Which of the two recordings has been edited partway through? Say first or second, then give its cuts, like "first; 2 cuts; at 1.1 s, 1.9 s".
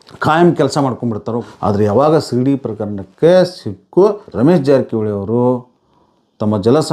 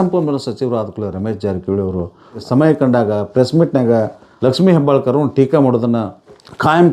first; 2 cuts; at 1.5 s, 4.3 s